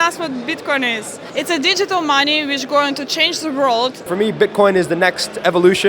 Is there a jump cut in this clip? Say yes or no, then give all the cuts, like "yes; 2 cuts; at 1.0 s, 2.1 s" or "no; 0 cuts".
yes; 2 cuts; at 1.2 s, 4.1 s